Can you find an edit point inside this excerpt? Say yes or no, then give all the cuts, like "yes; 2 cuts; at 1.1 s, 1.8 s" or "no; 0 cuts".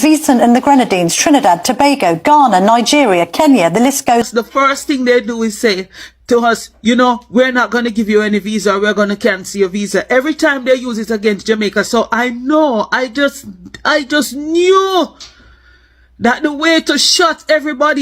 yes; 1 cut; at 4.2 s